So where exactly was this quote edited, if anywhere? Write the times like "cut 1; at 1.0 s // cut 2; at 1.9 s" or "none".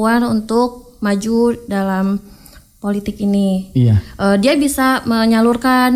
none